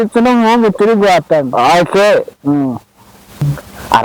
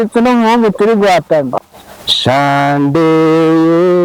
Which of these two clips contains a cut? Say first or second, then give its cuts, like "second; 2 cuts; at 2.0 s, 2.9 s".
second; 1 cut; at 1.5 s